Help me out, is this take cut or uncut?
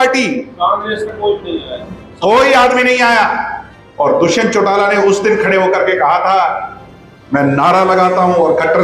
uncut